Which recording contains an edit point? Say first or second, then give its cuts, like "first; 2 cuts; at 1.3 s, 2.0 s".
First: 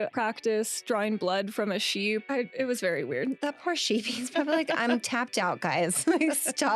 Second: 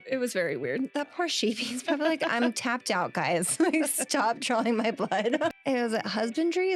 second; 1 cut; at 5.5 s